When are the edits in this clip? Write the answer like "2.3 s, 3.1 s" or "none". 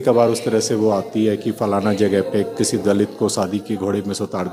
none

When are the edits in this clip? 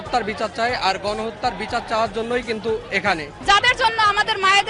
3.3 s

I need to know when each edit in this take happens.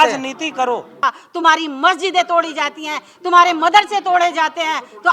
1.0 s

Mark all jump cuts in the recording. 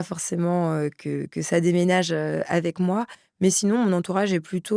none

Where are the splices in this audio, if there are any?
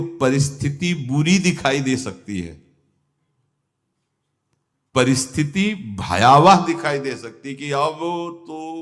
none

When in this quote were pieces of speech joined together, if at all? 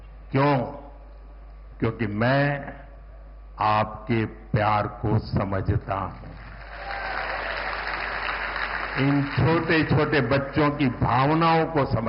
none

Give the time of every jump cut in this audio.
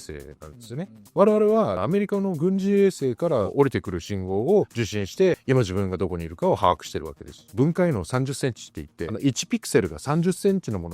1.0 s, 1.8 s, 5.4 s, 7.4 s

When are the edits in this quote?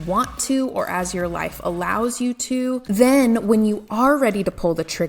3.0 s

